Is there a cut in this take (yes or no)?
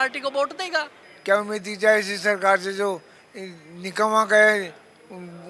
yes